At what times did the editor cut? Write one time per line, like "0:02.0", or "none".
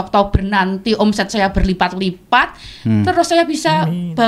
none